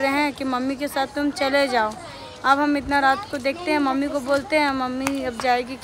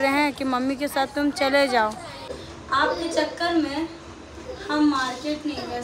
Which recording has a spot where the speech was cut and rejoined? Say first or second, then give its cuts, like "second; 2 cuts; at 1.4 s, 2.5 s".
second; 1 cut; at 2.3 s